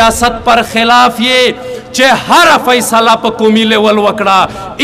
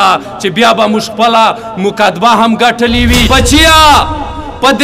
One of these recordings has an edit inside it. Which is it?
second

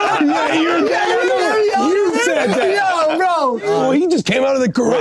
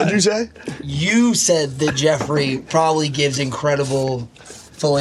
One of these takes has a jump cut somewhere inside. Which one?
first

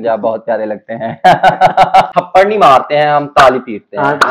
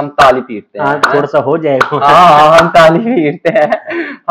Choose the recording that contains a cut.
first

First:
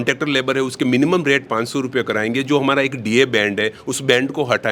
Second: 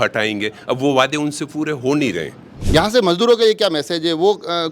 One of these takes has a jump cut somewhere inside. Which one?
second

